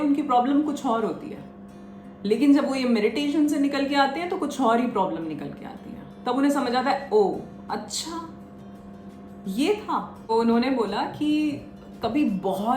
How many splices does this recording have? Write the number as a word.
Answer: one